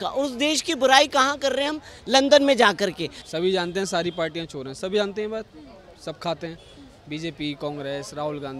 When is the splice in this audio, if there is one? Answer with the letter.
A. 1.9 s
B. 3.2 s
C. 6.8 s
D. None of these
B